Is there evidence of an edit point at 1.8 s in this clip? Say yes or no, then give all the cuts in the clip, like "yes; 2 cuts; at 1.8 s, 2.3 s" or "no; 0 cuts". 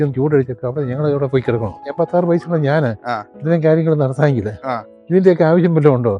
yes; 1 cut; at 1.8 s